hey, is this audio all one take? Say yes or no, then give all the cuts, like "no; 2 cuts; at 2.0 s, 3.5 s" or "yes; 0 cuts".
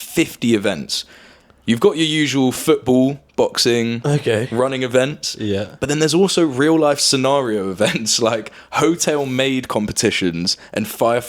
yes; 0 cuts